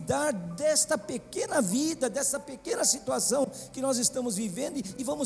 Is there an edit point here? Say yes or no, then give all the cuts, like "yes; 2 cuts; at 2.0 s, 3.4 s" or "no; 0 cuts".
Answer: no; 0 cuts